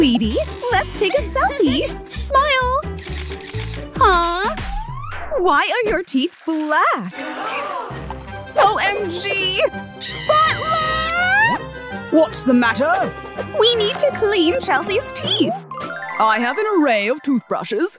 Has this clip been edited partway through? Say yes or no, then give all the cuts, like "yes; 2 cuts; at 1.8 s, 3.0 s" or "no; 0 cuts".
no; 0 cuts